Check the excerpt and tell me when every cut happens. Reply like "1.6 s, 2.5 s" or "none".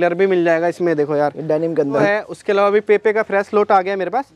2.0 s